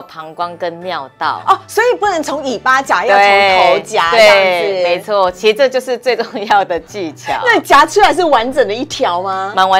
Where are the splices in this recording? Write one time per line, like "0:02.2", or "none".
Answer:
none